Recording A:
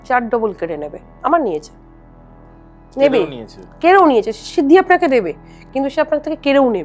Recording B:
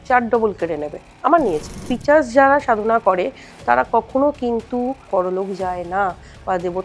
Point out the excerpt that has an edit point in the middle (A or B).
B